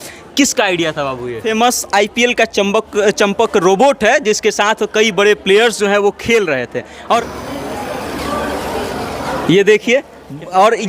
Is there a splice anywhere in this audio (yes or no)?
yes